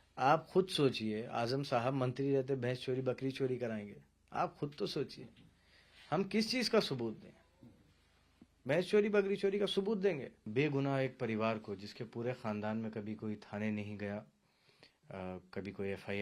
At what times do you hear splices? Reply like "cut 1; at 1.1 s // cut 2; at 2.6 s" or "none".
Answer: cut 1; at 10.4 s